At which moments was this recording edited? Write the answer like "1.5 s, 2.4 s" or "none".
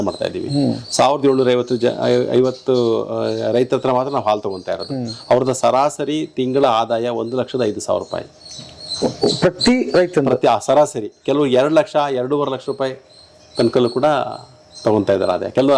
none